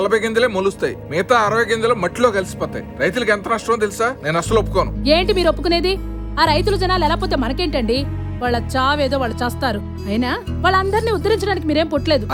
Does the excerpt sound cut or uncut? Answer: uncut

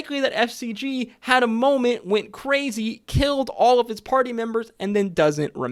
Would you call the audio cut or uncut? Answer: uncut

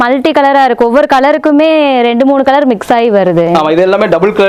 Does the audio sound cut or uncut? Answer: uncut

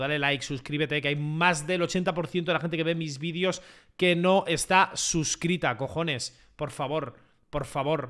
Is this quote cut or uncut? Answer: uncut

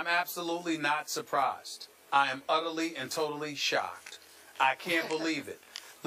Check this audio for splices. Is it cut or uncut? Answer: cut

